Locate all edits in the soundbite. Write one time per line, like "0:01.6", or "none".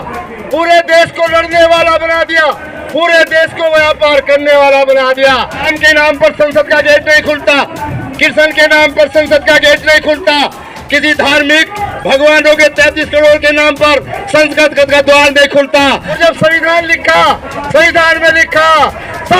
0:05.7
0:16.2

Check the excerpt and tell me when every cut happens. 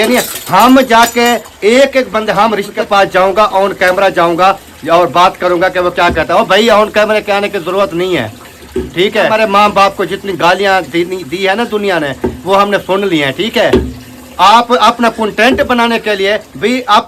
0:02.8
0:09.3

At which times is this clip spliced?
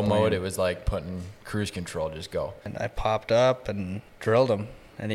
0:02.7
0:04.0

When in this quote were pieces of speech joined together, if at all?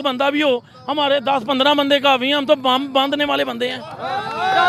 none

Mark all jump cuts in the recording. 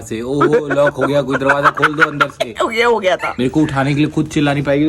0:03.3

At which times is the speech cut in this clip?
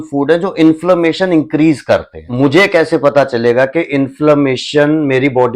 0:02.3

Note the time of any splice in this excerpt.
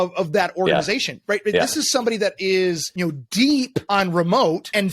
0:02.9
0:03.8

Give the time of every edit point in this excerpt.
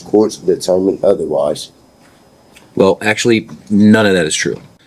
none

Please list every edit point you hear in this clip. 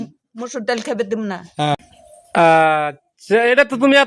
0:01.8

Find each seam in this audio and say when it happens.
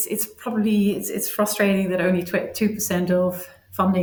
none

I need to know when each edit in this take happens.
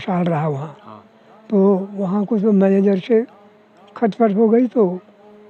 none

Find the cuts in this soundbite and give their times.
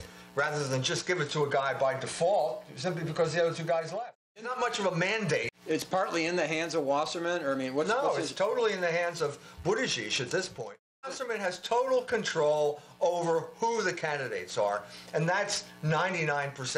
0:04.4
0:05.5
0:11.0

